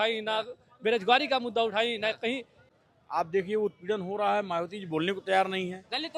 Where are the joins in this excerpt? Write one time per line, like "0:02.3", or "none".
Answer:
0:02.6